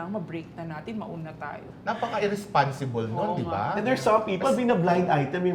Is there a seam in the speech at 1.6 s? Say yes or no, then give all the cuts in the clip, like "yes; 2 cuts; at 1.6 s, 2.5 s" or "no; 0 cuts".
yes; 1 cut; at 1.6 s